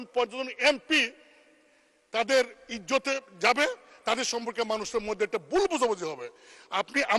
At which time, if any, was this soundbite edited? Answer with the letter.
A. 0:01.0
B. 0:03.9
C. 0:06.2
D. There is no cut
D